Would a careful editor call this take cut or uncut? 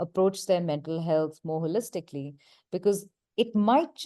cut